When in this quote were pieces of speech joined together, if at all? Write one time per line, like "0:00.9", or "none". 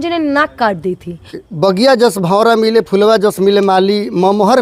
0:01.4